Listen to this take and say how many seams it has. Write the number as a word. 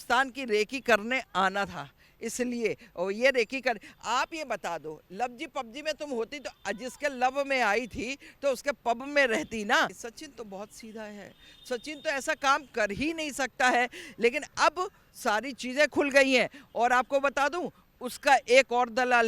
one